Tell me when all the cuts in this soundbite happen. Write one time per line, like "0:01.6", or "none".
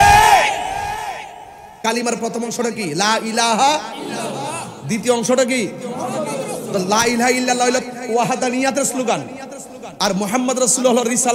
0:01.8